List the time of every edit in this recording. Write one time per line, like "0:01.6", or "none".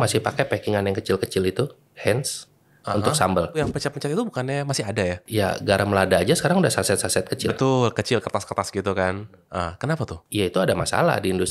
0:03.6